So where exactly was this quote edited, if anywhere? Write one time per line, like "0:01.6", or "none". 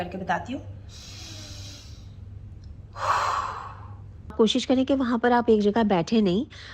0:04.2